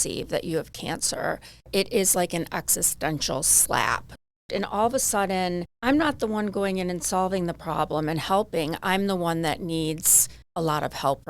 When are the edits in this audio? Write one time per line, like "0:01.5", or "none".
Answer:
0:01.7
0:04.3
0:05.7